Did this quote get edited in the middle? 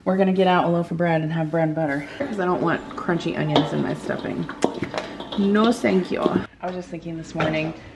yes; 2 cuts; at 2.2 s, 6.5 s

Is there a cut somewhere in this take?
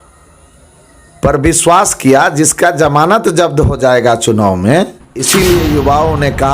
yes; 1 cut; at 5.3 s

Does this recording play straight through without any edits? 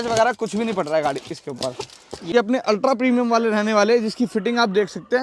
no; 1 cut; at 2.3 s

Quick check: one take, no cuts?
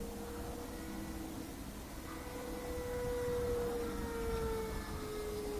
no; 1 cut; at 2.2 s

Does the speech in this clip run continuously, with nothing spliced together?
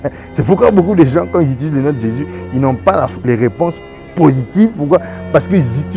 yes; 0 cuts

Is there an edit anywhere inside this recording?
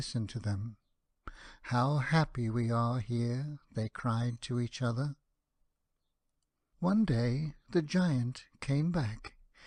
no; 0 cuts

